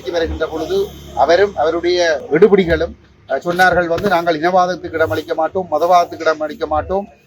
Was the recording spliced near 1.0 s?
no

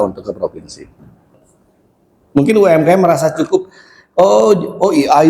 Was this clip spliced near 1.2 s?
yes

